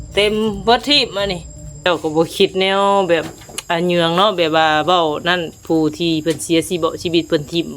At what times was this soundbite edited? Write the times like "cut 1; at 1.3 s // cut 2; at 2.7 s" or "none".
cut 1; at 1.9 s